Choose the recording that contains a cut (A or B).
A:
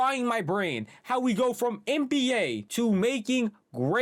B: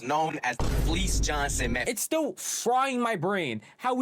B